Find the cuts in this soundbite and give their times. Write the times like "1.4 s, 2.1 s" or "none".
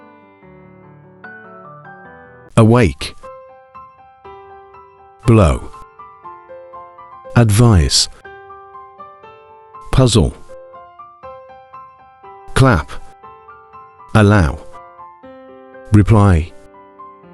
1.3 s, 2.5 s